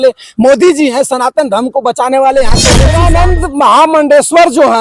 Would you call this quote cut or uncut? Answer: cut